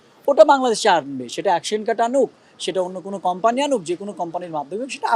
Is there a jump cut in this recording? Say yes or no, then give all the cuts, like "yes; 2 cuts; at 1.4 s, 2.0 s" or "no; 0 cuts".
no; 0 cuts